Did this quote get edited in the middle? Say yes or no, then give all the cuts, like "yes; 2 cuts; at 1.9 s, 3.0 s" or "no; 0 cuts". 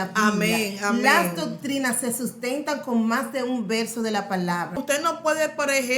yes; 1 cut; at 4.9 s